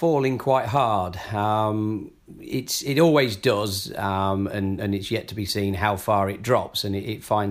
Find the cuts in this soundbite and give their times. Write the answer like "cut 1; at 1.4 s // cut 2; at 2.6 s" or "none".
none